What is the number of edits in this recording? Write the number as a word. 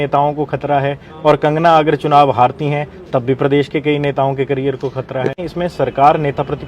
one